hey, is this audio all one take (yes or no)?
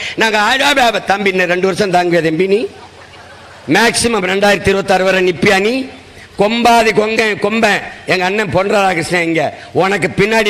yes